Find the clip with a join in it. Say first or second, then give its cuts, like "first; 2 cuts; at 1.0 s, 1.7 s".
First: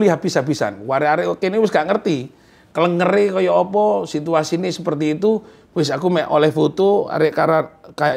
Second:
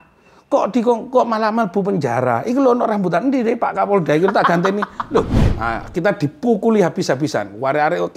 second; 1 cut; at 5.4 s